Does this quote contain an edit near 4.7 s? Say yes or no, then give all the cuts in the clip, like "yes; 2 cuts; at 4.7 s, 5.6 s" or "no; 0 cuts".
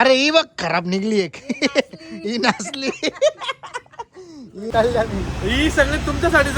yes; 1 cut; at 4.7 s